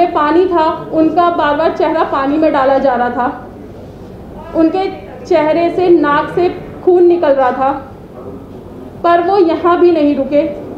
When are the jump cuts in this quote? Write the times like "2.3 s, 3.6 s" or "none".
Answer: none